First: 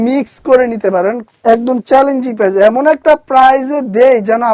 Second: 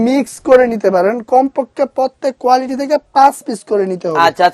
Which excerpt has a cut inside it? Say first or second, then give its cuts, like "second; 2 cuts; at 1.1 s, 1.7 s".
first; 1 cut; at 1.2 s